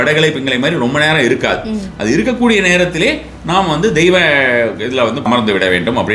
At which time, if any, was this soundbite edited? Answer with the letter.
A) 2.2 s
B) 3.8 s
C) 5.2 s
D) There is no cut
C